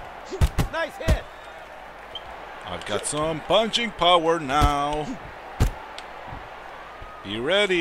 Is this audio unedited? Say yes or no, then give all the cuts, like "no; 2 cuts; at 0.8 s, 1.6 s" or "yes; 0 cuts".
yes; 0 cuts